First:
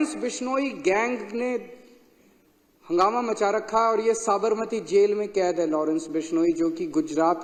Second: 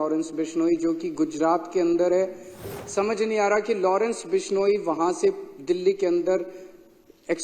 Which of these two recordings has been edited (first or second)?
second